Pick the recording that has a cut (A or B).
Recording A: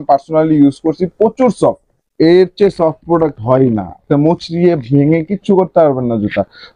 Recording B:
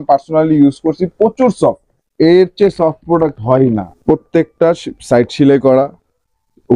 B